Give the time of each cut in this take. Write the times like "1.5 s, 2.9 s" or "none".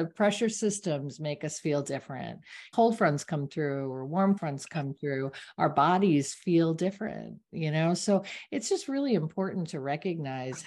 2.7 s, 4.4 s